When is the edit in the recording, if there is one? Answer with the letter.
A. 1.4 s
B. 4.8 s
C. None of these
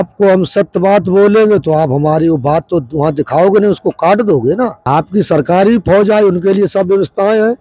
B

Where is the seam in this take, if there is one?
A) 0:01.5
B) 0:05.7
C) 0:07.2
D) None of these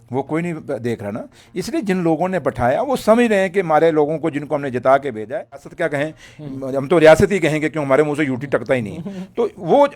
B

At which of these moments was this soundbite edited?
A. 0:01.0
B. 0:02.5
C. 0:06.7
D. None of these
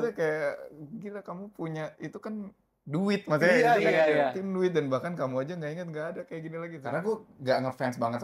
C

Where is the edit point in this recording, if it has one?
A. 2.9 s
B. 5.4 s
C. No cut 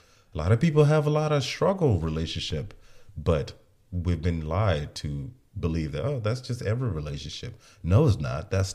C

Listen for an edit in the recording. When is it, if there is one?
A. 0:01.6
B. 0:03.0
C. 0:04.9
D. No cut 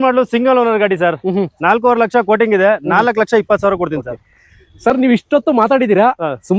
D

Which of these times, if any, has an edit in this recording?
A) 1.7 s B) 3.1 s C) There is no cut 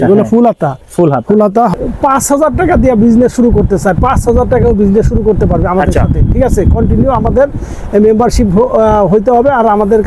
A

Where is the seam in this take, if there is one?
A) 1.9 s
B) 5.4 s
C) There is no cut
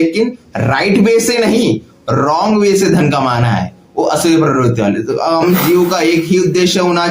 B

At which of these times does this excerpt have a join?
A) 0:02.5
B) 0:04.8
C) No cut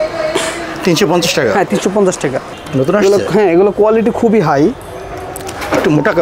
A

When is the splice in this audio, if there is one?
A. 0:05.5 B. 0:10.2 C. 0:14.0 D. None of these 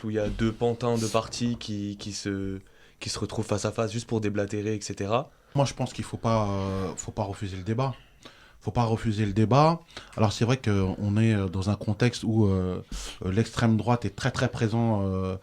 A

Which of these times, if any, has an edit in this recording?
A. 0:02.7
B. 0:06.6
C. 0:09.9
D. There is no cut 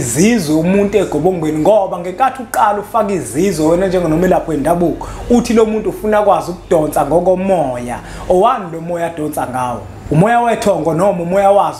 C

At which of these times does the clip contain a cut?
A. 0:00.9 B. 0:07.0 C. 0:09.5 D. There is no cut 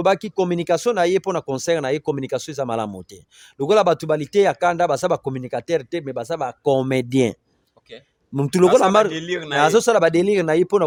D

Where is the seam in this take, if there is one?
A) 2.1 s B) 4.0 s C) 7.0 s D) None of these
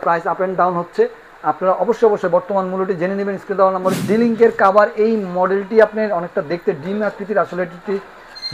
B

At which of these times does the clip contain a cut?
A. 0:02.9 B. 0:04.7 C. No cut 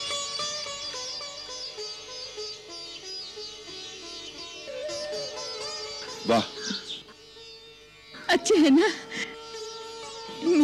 B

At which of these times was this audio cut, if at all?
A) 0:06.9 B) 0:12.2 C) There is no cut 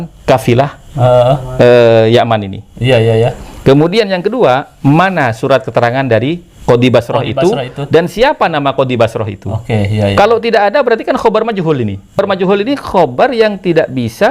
B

